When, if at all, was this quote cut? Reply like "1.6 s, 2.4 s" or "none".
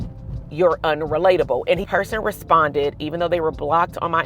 1.9 s